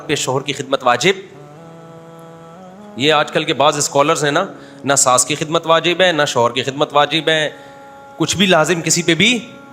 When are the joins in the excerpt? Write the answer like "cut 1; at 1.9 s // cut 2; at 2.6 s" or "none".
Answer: none